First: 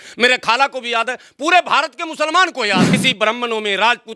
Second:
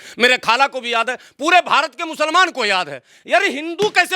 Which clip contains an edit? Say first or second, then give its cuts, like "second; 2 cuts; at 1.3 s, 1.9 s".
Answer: first; 1 cut; at 3.0 s